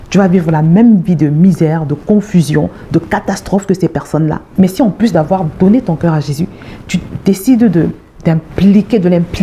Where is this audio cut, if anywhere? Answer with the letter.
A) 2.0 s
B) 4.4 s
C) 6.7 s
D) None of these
B